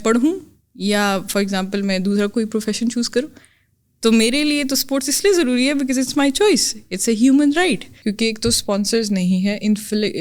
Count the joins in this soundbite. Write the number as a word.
one